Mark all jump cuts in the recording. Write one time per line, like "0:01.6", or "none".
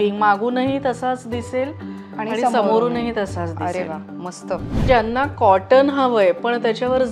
0:04.8